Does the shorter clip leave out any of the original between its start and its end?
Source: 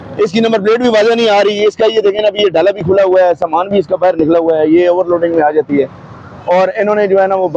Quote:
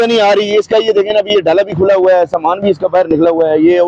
no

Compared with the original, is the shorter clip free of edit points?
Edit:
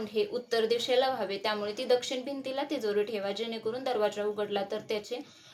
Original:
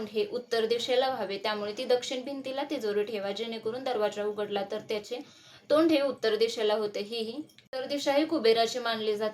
yes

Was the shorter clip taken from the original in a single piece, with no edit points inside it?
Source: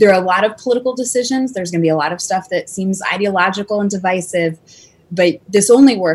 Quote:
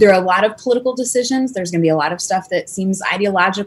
yes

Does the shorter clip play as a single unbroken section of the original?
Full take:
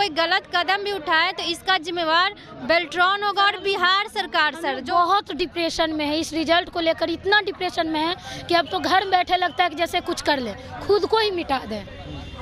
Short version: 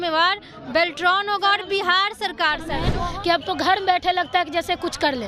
no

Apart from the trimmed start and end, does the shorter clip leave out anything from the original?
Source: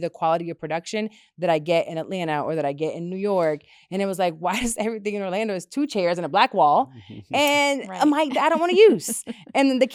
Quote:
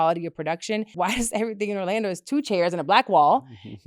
yes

